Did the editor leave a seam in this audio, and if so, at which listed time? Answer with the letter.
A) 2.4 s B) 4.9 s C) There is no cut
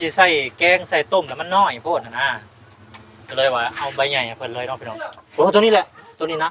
B